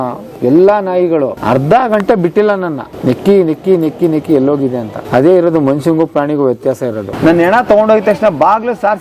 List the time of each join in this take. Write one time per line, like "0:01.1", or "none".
0:01.4
0:02.8
0:04.9
0:07.1